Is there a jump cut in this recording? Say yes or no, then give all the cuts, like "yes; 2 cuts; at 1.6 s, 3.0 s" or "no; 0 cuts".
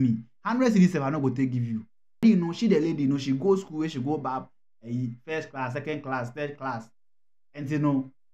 yes; 1 cut; at 2.2 s